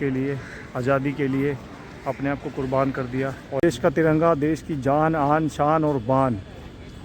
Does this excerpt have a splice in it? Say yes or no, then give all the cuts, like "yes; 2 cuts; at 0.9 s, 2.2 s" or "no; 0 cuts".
yes; 1 cut; at 3.6 s